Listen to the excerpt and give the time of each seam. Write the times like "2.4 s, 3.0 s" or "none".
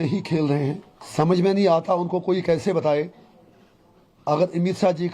1.0 s